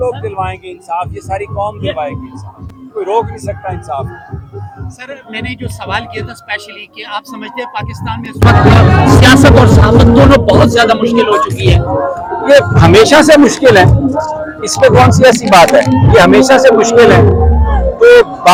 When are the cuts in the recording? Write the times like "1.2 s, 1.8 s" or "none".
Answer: none